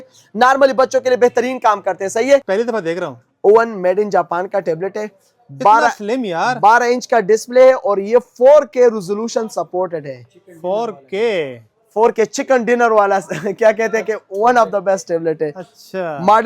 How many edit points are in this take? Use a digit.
1